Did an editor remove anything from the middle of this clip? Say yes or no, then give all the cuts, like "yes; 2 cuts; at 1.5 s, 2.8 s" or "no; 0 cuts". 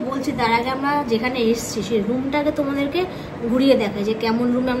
no; 0 cuts